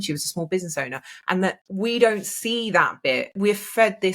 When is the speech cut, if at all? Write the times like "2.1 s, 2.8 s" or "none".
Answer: 1.6 s, 3.4 s